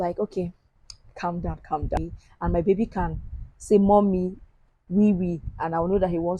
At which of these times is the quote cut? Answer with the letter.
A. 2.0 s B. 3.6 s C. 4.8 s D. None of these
A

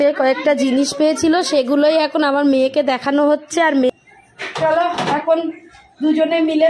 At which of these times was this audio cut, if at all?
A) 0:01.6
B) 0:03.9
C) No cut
B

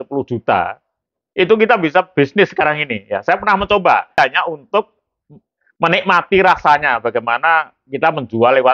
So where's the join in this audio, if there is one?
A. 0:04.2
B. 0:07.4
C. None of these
A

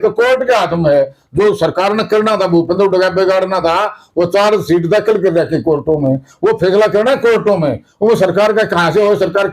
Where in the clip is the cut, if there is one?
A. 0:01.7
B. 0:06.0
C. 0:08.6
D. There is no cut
B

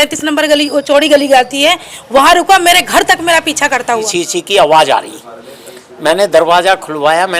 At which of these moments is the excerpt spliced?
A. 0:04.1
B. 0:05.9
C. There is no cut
A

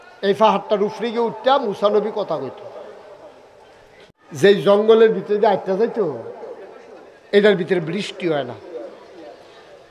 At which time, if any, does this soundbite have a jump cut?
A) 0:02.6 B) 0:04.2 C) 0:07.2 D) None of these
B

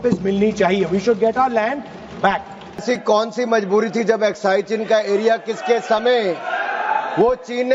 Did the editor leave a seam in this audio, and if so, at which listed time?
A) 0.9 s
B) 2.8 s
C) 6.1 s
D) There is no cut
B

